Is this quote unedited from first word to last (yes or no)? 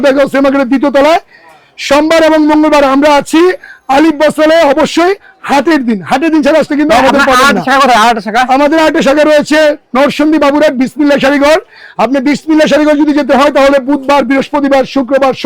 yes